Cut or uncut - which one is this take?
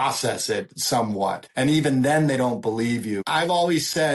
cut